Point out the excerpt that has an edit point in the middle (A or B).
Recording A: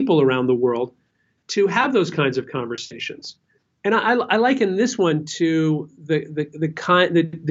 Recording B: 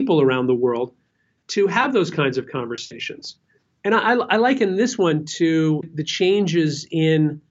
B